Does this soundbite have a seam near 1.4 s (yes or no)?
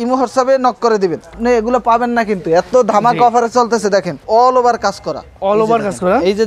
yes